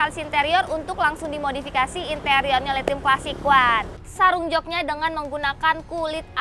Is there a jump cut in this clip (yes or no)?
yes